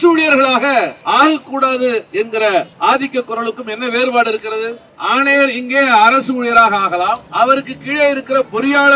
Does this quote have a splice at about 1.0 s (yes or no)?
yes